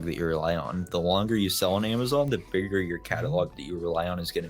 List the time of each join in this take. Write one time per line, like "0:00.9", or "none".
none